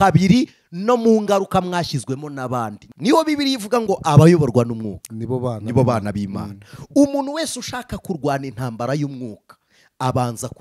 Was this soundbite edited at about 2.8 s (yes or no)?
yes